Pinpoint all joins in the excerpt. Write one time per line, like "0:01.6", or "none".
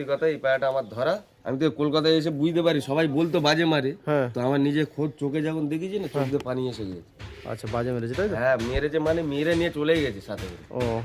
0:01.3